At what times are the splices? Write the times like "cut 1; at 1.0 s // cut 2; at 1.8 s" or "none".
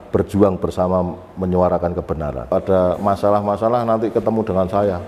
cut 1; at 2.5 s